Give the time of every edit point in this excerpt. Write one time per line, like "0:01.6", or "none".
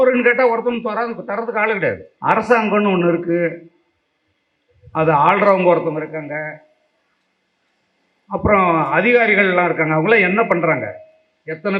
0:02.1